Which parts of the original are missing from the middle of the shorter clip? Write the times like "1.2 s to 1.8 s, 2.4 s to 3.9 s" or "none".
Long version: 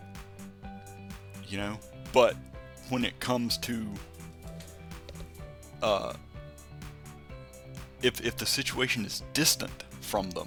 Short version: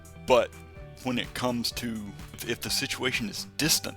4.3 s to 8.2 s